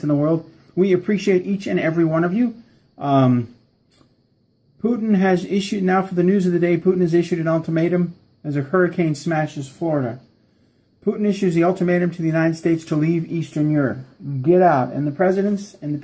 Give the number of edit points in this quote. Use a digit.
0